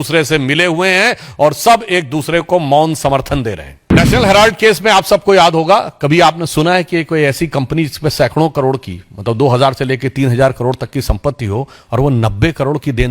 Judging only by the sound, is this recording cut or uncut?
cut